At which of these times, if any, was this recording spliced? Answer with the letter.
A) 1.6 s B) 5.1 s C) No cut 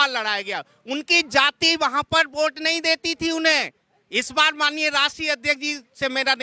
C